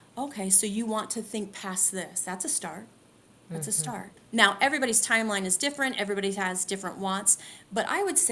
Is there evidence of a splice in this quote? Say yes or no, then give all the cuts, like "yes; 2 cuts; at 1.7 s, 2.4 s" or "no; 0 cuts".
yes; 1 cut; at 4.1 s